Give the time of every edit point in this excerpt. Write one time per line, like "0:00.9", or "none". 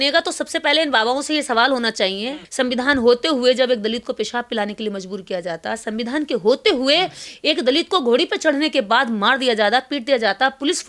0:02.4